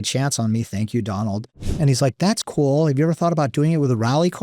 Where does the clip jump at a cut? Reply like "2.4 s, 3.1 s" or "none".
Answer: 1.6 s